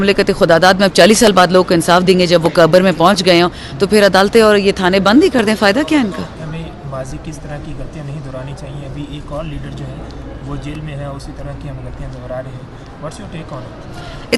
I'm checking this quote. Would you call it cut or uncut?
cut